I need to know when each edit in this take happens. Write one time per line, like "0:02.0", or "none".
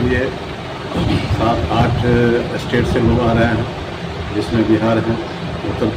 none